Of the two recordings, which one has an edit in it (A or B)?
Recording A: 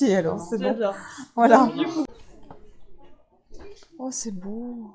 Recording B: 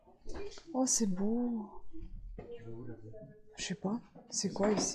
A